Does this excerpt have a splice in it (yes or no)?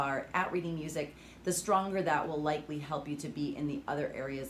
no